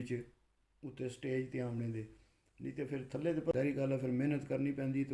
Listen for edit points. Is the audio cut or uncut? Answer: cut